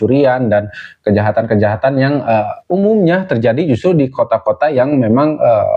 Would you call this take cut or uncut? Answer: uncut